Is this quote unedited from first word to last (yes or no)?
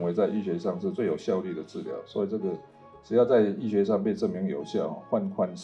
no